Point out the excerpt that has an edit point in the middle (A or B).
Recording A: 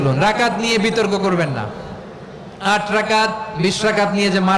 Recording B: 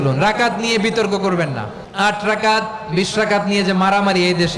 B